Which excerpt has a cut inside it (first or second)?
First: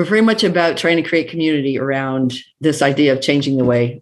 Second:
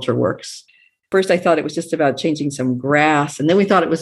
second